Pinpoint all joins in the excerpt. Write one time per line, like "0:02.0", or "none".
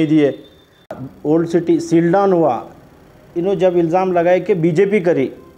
0:00.9